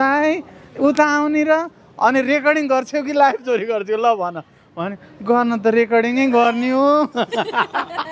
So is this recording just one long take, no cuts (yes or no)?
yes